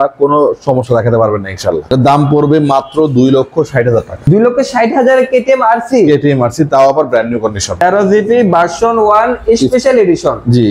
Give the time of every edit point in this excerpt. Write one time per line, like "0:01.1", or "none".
0:01.8
0:04.2
0:07.7